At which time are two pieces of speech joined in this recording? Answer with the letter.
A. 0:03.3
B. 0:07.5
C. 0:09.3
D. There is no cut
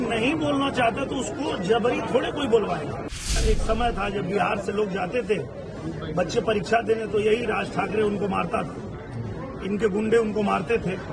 A